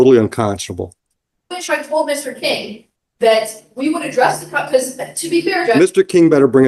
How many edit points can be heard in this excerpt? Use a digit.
0